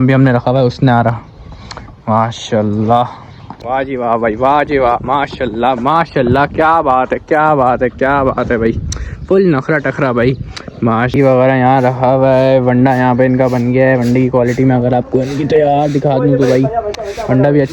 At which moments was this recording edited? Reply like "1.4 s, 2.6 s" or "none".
3.6 s, 11.1 s